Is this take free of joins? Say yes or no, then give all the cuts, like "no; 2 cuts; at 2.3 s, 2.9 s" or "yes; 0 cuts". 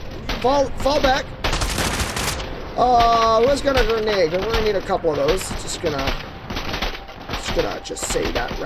yes; 0 cuts